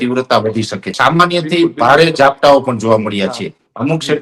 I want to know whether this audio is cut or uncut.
cut